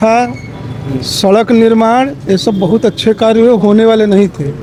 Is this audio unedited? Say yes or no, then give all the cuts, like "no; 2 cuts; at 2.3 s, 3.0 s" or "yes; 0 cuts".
yes; 0 cuts